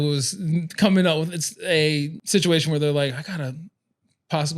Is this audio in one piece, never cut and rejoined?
no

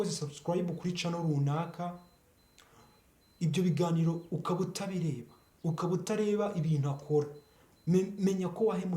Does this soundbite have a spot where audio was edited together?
no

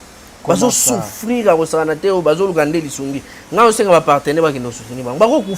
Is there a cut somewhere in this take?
no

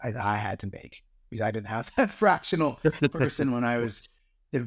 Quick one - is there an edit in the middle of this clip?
no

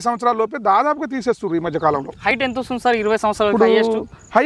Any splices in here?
no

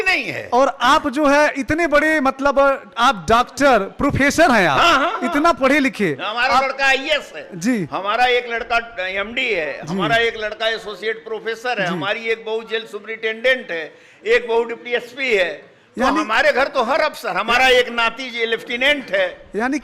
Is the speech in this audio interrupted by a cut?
no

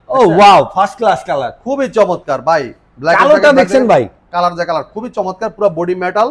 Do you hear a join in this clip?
no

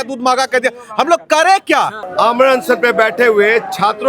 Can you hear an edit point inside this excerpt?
yes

